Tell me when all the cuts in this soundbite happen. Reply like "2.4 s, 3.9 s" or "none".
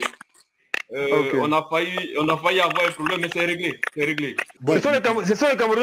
4.6 s